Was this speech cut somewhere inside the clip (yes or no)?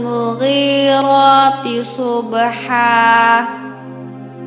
no